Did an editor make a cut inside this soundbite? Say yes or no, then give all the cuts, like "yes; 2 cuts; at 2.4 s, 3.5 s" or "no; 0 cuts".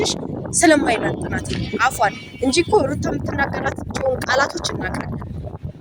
no; 0 cuts